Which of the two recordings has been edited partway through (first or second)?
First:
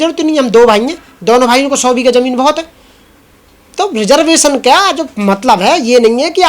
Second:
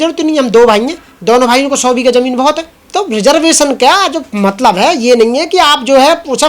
second